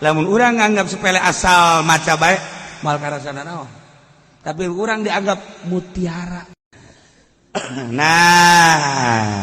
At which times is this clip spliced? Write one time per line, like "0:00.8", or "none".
0:06.5